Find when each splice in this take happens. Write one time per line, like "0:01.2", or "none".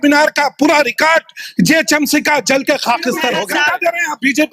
0:03.4